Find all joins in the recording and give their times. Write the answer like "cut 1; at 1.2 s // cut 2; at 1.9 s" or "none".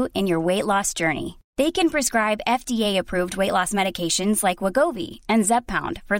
none